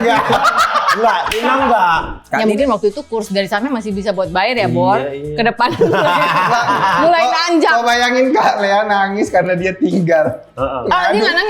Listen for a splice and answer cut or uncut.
cut